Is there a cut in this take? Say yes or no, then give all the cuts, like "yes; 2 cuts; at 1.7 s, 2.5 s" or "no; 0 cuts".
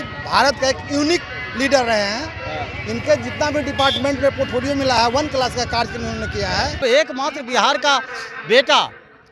yes; 1 cut; at 6.8 s